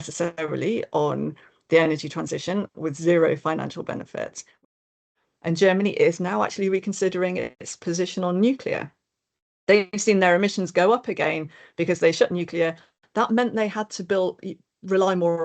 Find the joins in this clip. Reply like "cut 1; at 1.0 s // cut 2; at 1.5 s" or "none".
cut 1; at 4.7 s

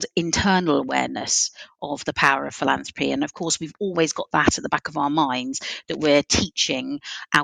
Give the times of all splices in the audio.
none

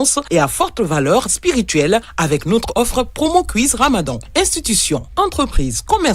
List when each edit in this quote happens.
cut 1; at 2.7 s

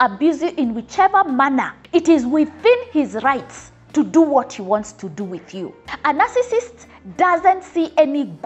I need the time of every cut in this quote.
cut 1; at 1.8 s // cut 2; at 5.8 s

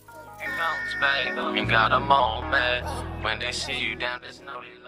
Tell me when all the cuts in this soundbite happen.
none

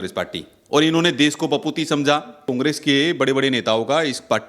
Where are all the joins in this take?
cut 1; at 2.5 s

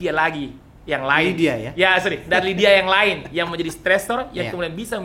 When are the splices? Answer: none

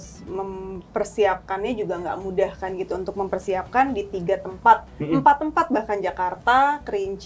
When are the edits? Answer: none

